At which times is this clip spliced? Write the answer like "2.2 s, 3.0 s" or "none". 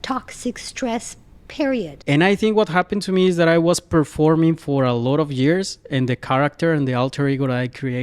1.9 s

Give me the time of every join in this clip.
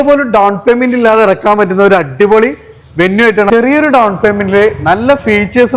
3.5 s

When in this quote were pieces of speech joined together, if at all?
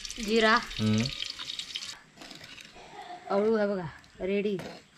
1.9 s

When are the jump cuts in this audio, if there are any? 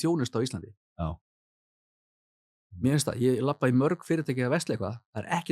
none

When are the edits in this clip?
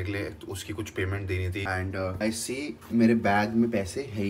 1.6 s

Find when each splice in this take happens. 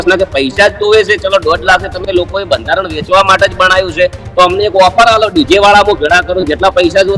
none

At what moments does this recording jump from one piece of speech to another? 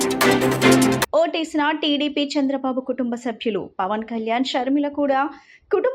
1.0 s

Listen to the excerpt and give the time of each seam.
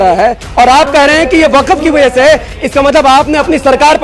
none

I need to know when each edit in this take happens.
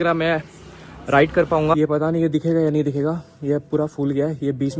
1.7 s

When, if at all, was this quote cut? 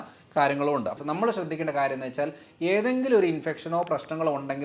1.0 s

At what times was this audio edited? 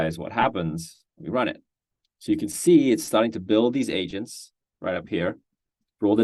none

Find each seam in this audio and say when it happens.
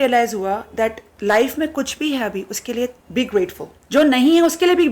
1.1 s, 3.0 s

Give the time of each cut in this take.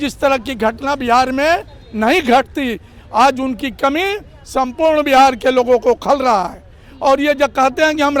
none

